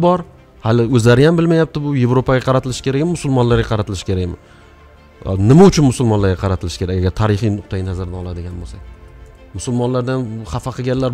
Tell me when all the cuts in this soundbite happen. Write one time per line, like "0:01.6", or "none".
none